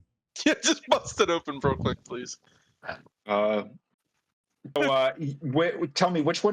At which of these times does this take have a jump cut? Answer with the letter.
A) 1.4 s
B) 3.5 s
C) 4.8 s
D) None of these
C